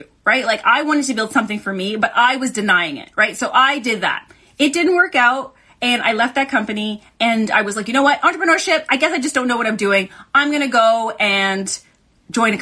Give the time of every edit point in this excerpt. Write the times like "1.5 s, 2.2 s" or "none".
none